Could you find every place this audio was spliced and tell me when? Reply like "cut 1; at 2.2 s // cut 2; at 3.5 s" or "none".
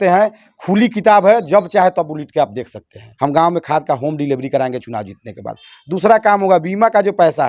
cut 1; at 3.1 s